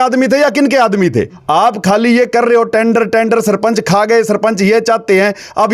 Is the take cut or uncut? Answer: cut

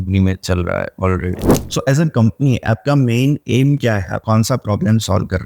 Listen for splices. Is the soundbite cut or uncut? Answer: cut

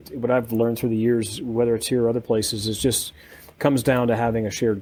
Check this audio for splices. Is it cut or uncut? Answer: uncut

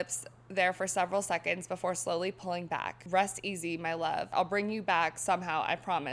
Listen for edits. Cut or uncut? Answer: cut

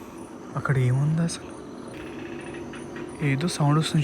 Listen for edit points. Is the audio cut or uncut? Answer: cut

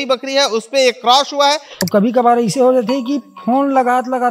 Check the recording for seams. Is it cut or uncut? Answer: cut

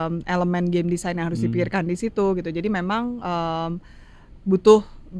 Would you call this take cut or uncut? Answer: uncut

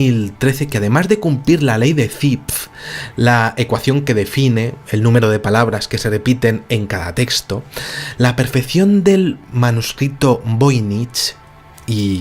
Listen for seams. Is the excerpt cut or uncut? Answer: cut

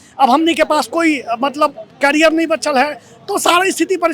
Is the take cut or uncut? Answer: uncut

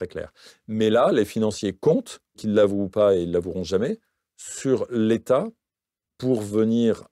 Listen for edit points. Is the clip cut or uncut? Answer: cut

